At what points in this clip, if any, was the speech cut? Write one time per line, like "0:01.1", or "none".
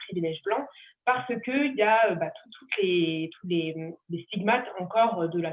none

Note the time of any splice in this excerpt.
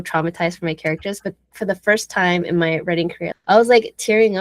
0:01.5
0:03.3

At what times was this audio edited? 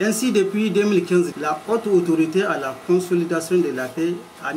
0:01.3

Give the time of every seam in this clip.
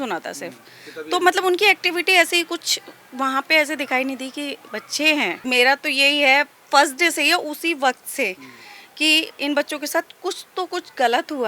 0:05.4

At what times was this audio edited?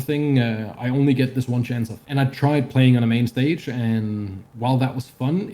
0:02.0

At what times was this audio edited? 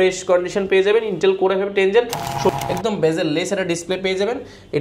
0:02.5

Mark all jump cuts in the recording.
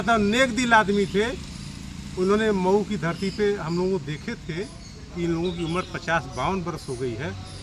none

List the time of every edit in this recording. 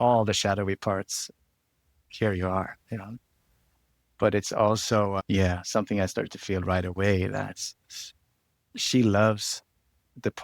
0:05.2

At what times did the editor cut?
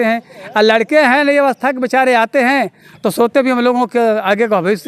none

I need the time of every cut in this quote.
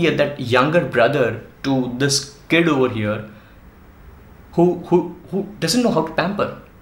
none

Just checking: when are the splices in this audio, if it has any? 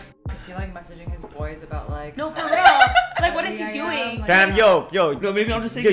none

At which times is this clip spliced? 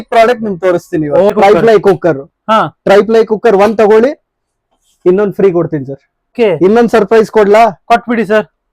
0:01.3
0:06.3

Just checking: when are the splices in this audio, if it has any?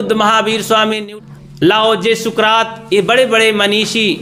0:01.0

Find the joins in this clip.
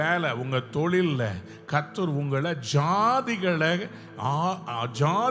none

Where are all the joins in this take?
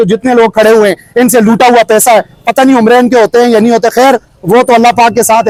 none

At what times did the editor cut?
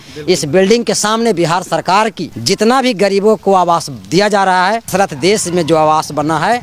0:02.3
0:04.4

